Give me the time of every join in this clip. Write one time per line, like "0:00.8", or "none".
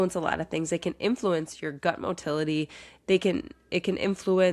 none